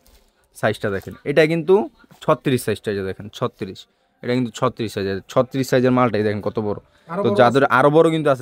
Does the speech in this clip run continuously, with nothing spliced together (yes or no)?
yes